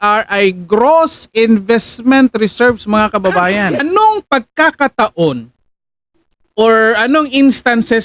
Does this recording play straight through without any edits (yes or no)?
no